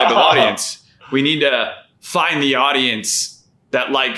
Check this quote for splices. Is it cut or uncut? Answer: uncut